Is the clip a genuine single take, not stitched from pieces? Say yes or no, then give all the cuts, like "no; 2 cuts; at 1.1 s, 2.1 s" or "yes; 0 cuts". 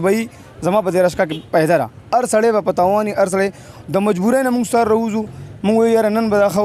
yes; 0 cuts